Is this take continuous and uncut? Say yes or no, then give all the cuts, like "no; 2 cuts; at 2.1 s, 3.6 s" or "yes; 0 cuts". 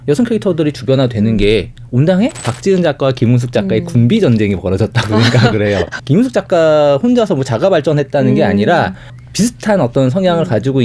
no; 3 cuts; at 2.5 s, 6.0 s, 9.2 s